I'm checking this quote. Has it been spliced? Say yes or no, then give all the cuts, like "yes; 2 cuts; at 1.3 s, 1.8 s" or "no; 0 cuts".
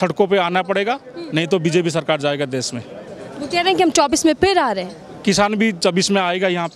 no; 0 cuts